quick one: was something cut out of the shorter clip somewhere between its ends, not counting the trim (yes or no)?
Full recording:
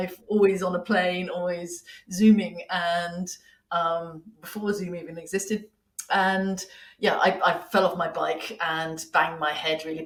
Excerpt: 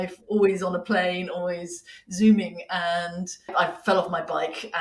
yes